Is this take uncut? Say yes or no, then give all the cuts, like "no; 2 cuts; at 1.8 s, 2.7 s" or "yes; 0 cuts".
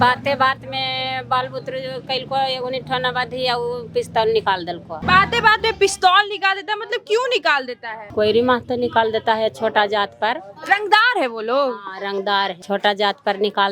yes; 0 cuts